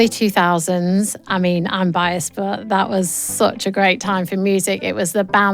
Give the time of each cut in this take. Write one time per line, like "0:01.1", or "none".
0:01.2